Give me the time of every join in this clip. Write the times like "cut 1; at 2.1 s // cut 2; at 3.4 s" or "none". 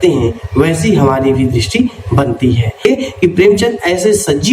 cut 1; at 2.8 s